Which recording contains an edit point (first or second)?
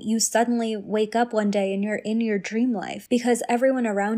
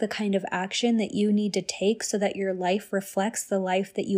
first